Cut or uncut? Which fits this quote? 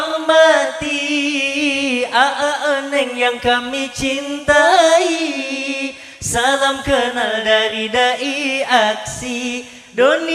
uncut